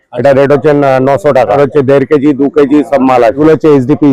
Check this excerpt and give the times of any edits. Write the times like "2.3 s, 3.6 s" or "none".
1.5 s, 3.4 s